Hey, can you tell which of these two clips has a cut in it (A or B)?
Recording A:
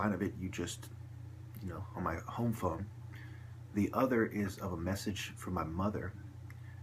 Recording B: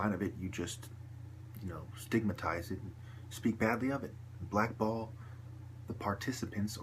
B